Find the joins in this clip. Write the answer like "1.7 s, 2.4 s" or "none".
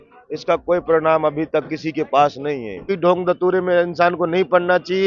2.9 s